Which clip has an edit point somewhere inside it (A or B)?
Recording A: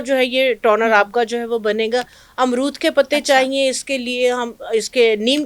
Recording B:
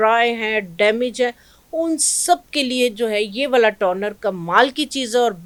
A